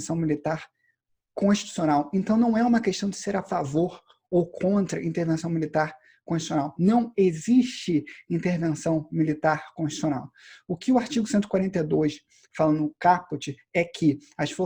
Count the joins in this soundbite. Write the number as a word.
zero